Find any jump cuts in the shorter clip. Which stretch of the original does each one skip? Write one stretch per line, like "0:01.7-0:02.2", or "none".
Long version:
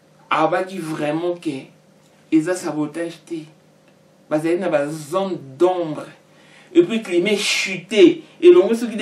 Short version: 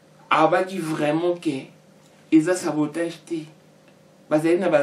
none

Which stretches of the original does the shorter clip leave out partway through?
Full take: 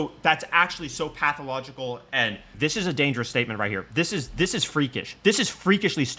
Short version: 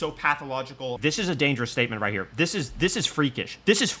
0:02.0-0:02.6

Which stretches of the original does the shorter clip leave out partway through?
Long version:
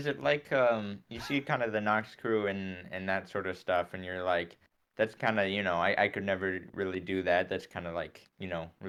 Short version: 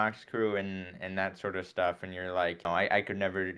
0:04.6-0:05.7

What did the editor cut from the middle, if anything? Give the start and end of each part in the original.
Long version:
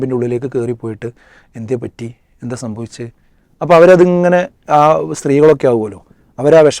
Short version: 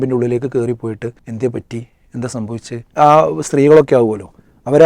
0:01.2-0:01.5
0:03.1-0:04.6

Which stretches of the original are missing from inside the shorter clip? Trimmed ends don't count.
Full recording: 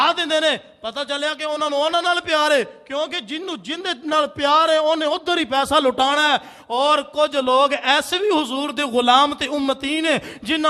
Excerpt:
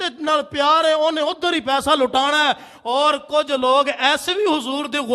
none

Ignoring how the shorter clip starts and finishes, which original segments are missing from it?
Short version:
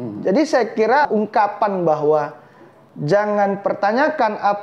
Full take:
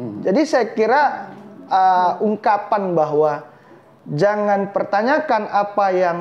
0:01.1-0:02.2

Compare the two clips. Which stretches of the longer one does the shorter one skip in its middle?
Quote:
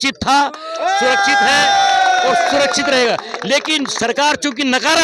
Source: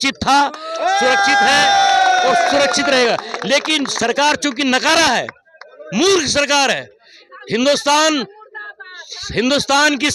none

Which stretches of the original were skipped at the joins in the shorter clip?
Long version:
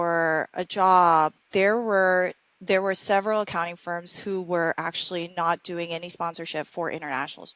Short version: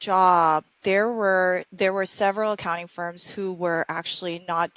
0:02.4-0:02.6

